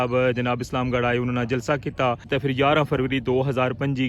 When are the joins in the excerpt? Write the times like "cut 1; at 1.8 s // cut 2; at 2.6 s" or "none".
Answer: cut 1; at 2.3 s